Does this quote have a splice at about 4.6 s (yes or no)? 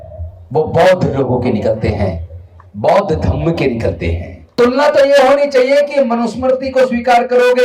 yes